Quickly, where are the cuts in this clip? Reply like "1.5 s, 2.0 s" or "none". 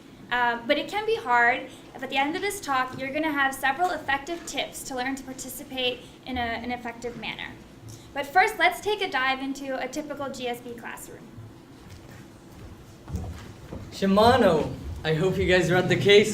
6.2 s